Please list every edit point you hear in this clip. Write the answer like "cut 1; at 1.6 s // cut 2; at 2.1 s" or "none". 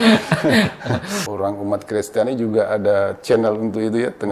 cut 1; at 1.3 s